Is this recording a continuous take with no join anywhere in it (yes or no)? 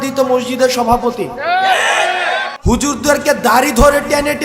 no